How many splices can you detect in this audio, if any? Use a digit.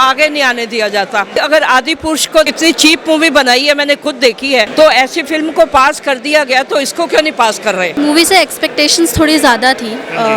4